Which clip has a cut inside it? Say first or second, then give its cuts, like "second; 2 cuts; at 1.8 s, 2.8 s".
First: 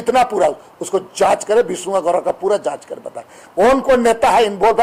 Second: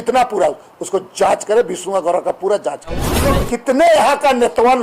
second; 1 cut; at 3.2 s